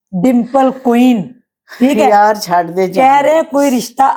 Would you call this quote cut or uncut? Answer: uncut